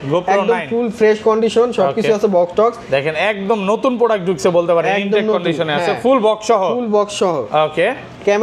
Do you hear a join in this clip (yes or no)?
no